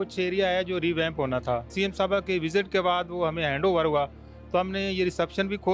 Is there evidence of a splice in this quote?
yes; 1 cut; at 1.7 s

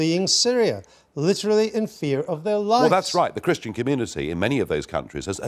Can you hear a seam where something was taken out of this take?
no; 0 cuts

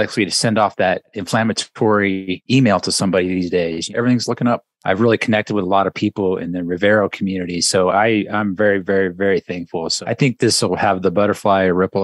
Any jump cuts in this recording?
yes; 5 cuts; at 1.1 s, 2.4 s, 3.9 s, 4.7 s, 9.8 s

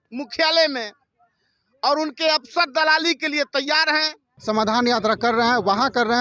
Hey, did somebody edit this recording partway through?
yes; 1 cut; at 4.3 s

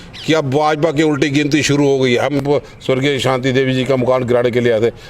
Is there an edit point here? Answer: yes; 1 cut; at 2.4 s

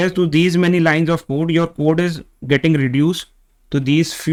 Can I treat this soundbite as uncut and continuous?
yes; 0 cuts

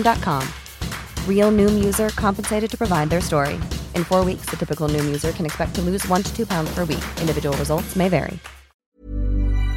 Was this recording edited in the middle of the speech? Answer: yes; 1 cut; at 8.8 s

